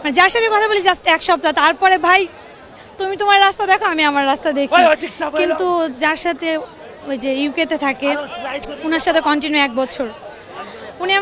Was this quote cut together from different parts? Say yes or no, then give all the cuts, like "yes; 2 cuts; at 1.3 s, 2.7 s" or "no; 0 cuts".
no; 0 cuts